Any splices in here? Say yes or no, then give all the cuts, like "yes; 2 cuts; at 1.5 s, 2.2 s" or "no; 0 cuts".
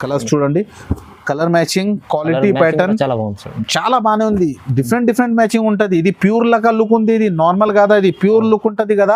no; 0 cuts